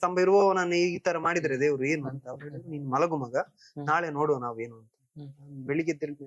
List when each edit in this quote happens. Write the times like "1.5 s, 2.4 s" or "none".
none